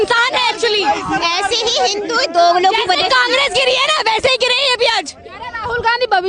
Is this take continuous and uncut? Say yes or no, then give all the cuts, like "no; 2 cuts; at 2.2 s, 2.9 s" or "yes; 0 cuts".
yes; 0 cuts